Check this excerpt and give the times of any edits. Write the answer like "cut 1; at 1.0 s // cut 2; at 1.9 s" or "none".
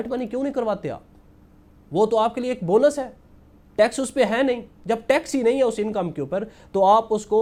none